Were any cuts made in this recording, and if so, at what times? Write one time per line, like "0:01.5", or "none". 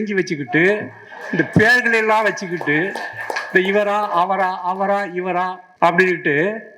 0:05.6